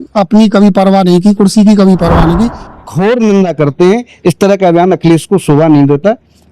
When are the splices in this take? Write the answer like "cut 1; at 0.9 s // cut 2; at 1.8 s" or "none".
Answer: cut 1; at 2.6 s